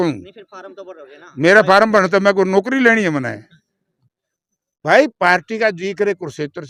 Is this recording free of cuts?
yes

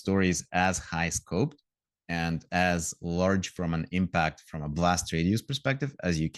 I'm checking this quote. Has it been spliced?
no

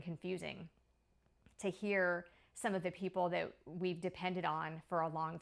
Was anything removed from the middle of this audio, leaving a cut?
no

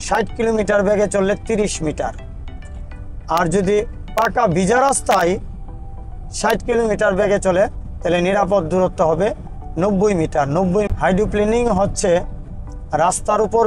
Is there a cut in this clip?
yes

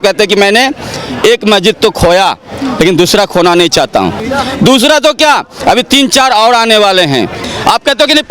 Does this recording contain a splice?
yes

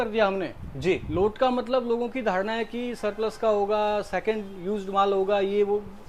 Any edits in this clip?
no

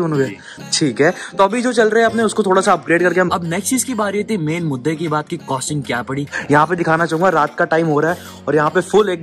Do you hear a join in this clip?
yes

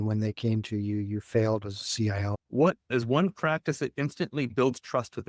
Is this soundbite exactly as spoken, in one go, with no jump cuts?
no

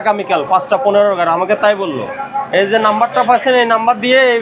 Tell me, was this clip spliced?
no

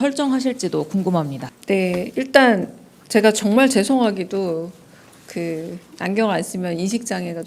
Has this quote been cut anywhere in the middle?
yes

